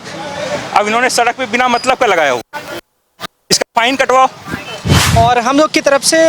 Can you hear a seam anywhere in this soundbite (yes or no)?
yes